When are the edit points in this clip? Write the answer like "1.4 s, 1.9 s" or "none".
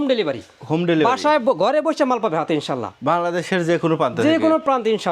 none